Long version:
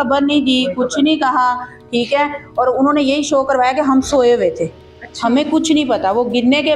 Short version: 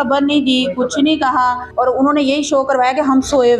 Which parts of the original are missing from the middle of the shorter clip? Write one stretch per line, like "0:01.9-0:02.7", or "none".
0:01.6-0:02.4